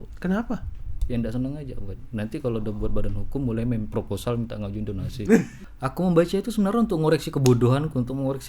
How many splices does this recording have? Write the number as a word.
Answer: one